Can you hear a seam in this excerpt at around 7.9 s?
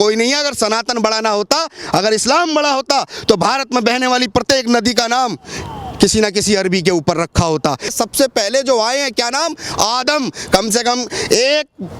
yes; 1 cut; at 7.9 s

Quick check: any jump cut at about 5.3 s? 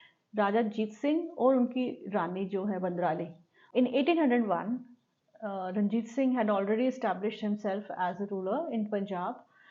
no; 1 cut; at 3.6 s

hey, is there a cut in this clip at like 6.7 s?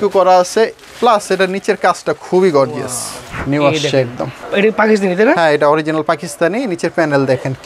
no; 1 cut; at 3.3 s

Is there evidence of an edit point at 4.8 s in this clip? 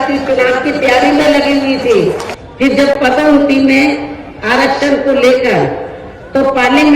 no; 1 cut; at 2.3 s

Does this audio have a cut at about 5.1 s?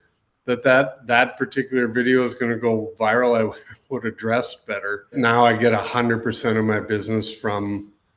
yes; 1 cut; at 5.1 s

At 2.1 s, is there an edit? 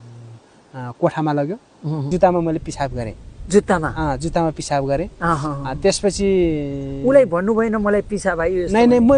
yes; 1 cut; at 2.1 s

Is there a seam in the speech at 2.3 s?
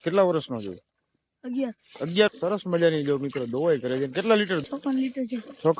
yes; 2 cuts; at 2.3 s, 4.6 s

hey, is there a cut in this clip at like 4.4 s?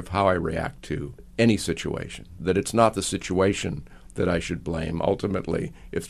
no; 2 cuts; at 1.2 s, 2.3 s

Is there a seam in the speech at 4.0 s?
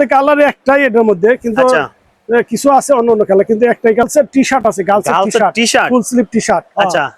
yes; 1 cut; at 4.0 s

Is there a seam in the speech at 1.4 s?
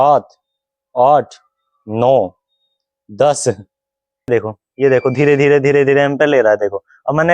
no; 1 cut; at 4.3 s

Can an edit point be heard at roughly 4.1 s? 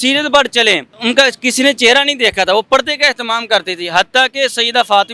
no; 1 cut; at 0.9 s

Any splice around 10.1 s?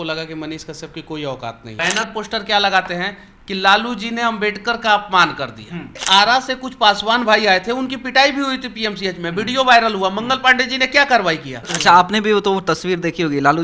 no; 3 cuts; at 1.8 s, 6.0 s, 11.6 s

